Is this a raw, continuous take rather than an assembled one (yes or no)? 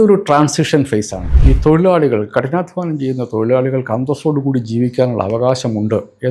no